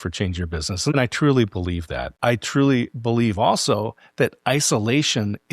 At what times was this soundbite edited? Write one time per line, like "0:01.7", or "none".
0:00.9
0:02.1